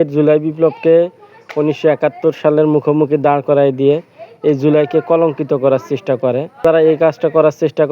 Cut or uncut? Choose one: cut